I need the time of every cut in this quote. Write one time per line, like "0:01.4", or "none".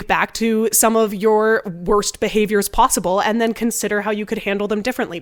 none